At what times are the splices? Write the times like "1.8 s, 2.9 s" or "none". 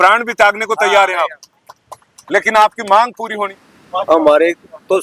3.5 s